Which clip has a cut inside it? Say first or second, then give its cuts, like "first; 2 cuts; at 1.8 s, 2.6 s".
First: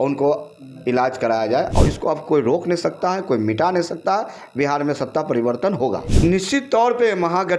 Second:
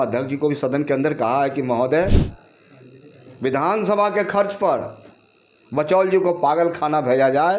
first; 2 cuts; at 1.7 s, 6.1 s